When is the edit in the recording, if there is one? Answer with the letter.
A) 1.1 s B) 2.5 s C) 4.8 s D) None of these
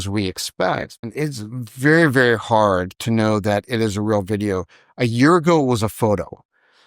A